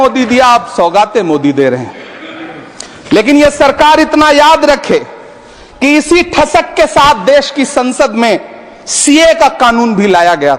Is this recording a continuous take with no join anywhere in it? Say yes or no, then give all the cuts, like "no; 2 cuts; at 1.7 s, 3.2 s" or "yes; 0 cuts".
yes; 0 cuts